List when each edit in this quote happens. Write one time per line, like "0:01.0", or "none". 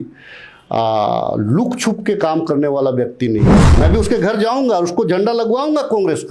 0:03.6

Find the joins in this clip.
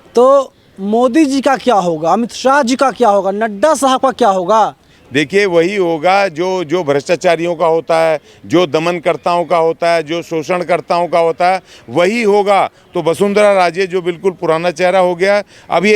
0:12.8

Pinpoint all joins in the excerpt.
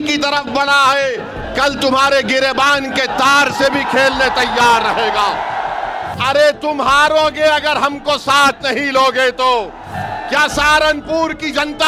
0:06.1
0:09.9

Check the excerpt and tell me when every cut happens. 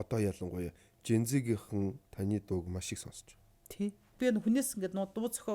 0:04.2

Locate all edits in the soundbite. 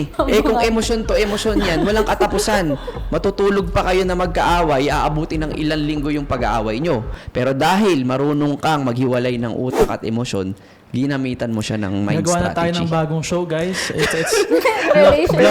none

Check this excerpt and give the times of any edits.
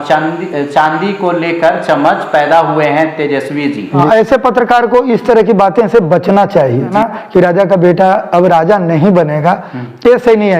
0:04.0
0:06.9

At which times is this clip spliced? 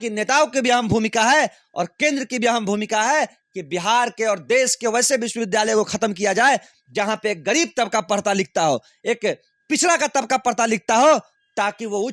none

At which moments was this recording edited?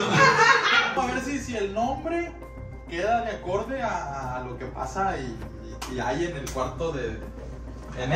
0:01.0

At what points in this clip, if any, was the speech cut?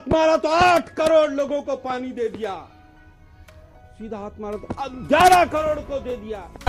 none

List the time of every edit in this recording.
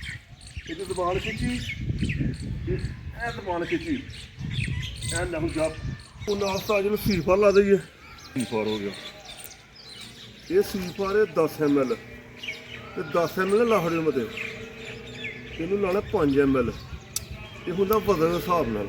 0:06.3
0:08.4

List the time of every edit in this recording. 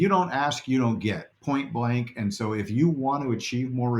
0:01.3

